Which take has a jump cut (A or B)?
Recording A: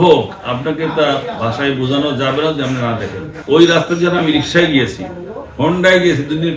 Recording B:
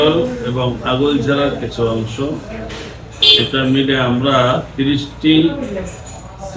A